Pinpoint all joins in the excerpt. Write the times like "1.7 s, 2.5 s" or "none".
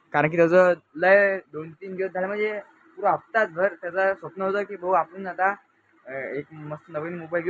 none